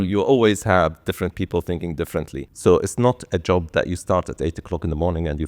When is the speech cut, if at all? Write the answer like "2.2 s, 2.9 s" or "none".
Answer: 2.4 s